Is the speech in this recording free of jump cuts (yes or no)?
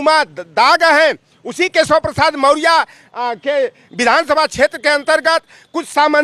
yes